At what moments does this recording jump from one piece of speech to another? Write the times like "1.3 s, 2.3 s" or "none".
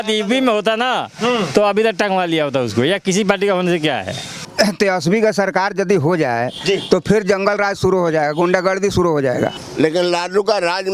4.4 s, 9.6 s